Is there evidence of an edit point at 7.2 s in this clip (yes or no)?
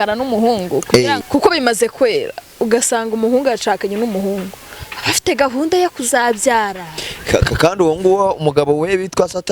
no